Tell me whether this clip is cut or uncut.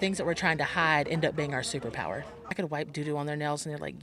cut